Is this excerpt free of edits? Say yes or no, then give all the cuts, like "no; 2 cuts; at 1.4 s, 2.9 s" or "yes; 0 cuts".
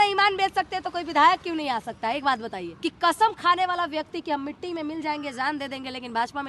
no; 1 cut; at 2.7 s